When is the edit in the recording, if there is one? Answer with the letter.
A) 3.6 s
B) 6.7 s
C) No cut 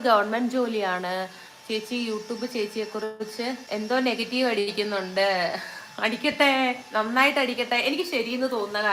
A